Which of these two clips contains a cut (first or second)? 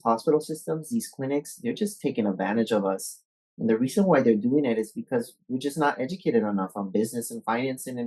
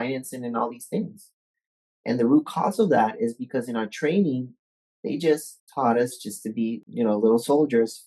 second